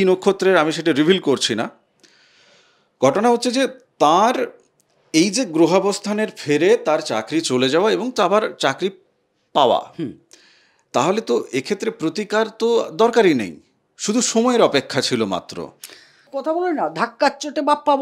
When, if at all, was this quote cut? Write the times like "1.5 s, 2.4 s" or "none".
16.3 s